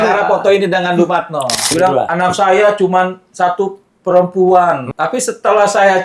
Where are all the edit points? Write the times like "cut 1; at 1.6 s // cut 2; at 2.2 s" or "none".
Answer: cut 1; at 1.7 s // cut 2; at 4.9 s